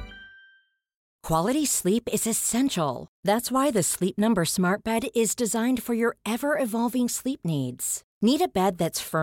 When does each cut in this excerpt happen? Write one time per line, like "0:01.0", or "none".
0:01.1